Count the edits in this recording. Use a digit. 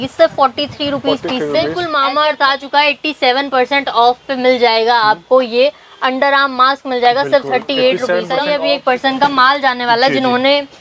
2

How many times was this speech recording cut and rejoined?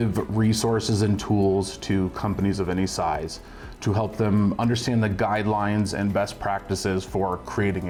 0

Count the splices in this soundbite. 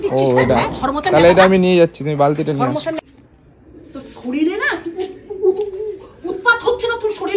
1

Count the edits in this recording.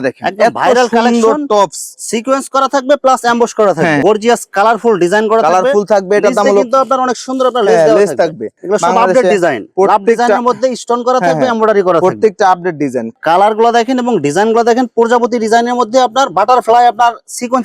3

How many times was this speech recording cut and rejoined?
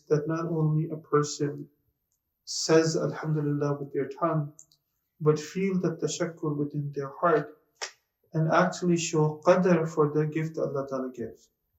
0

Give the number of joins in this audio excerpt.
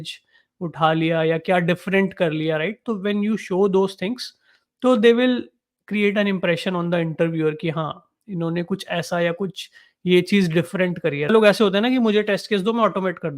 1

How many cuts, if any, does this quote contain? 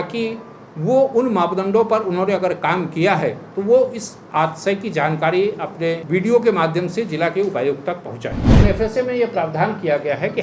2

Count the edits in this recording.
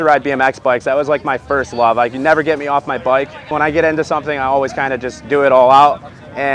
1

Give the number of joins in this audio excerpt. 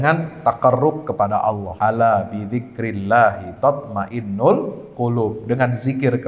1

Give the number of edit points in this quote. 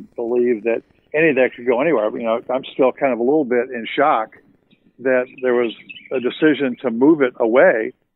1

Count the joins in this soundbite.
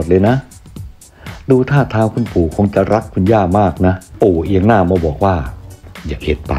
1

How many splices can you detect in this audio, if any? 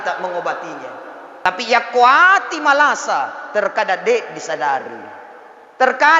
1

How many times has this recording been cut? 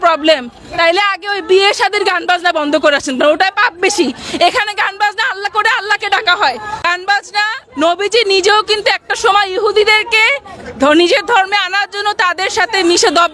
1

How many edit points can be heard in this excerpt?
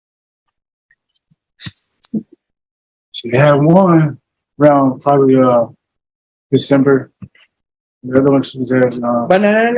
0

